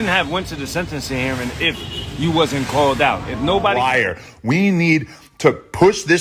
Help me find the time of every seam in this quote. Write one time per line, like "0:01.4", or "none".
0:03.9